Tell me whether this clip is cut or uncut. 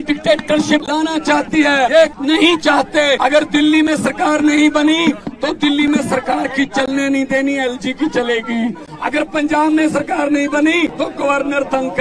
cut